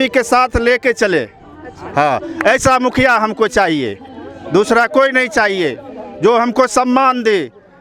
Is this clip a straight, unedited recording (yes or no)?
yes